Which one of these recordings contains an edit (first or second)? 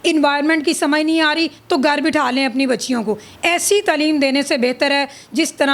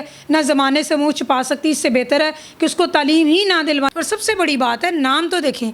second